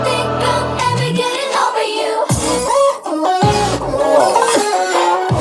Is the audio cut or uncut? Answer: uncut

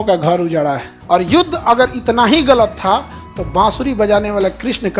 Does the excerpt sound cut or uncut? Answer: cut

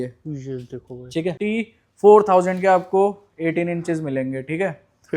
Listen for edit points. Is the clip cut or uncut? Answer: cut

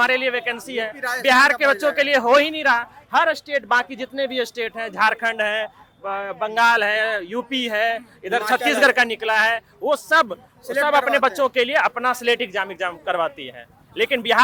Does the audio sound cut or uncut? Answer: uncut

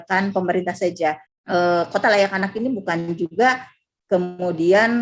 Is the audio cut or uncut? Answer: cut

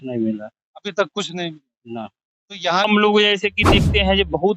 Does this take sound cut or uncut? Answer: cut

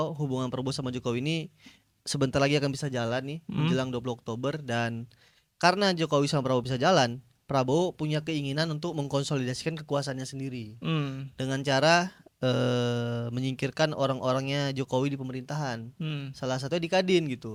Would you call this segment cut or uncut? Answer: uncut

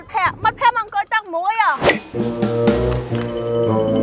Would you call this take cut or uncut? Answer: cut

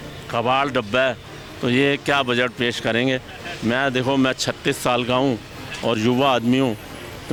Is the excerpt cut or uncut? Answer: uncut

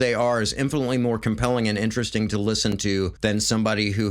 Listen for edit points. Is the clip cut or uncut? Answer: cut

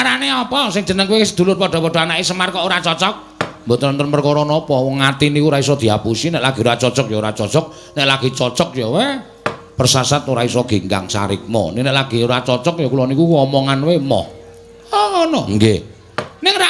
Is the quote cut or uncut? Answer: uncut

